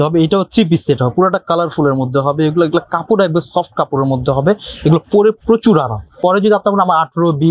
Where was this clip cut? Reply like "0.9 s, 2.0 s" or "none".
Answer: 6.2 s